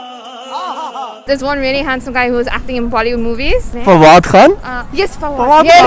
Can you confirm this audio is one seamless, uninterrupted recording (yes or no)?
no